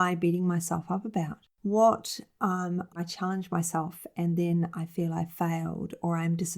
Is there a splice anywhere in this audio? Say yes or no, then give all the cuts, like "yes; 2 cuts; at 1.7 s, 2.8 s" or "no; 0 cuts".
yes; 1 cut; at 3.0 s